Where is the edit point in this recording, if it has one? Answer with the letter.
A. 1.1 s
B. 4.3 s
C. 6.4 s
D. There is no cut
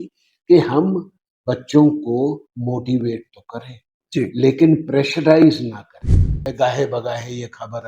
C